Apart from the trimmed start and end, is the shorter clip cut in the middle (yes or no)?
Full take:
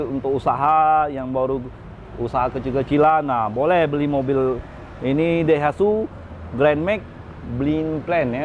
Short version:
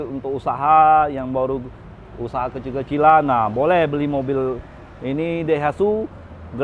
no